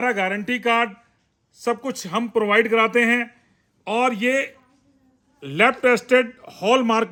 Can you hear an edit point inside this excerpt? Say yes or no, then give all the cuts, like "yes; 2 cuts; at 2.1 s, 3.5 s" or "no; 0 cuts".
no; 0 cuts